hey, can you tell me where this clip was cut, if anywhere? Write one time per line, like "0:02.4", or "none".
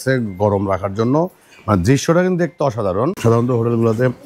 0:03.2